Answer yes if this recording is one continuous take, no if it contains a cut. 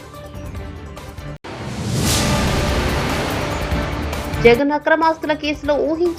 no